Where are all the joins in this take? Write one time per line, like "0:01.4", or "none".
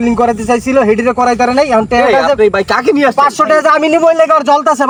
none